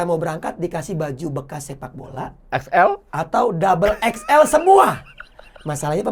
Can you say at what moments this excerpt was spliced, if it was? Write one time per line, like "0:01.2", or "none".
none

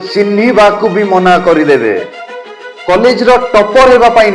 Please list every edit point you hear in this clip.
0:02.6

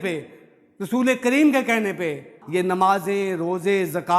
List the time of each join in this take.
0:02.4

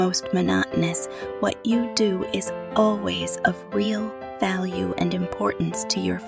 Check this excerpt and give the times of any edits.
none

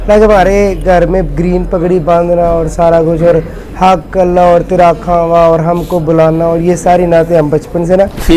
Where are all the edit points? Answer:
none

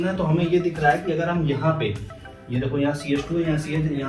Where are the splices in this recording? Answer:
none

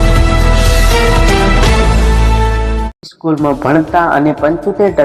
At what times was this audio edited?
0:03.0

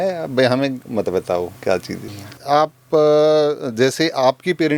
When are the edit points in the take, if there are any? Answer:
0:02.4

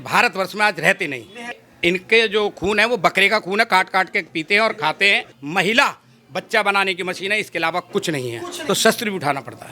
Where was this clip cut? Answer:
0:01.7
0:05.3
0:08.6

